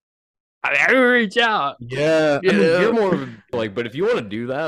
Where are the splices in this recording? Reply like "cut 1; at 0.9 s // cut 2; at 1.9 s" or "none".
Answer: cut 1; at 3.5 s